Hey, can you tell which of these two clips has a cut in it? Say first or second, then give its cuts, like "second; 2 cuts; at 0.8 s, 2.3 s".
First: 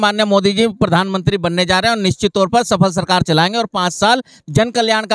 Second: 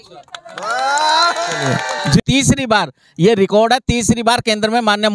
second; 1 cut; at 2.2 s